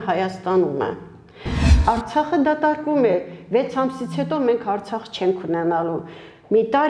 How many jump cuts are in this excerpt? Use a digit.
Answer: 1